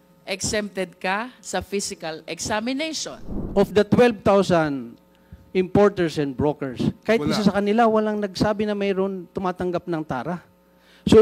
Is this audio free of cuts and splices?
no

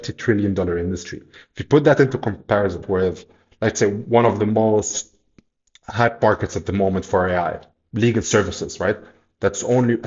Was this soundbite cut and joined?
yes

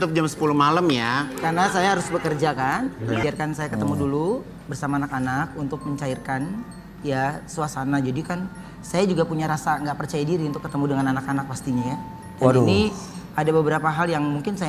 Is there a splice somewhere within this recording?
no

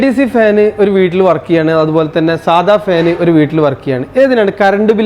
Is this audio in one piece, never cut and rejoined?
yes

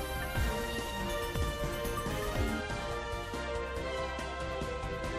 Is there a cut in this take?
no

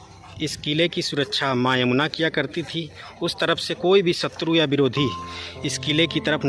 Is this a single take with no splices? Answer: yes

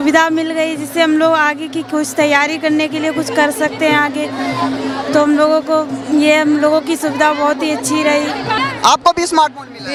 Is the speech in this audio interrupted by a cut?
no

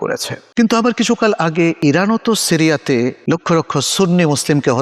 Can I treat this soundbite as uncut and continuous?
no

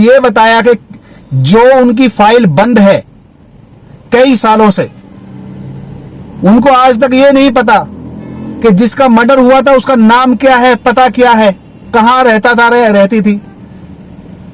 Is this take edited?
no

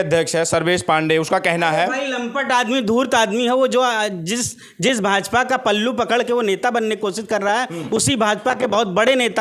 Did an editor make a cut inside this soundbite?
no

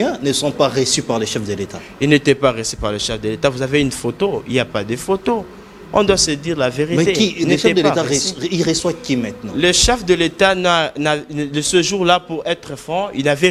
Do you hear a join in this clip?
no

